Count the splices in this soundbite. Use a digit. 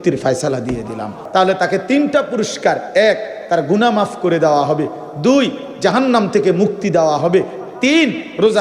1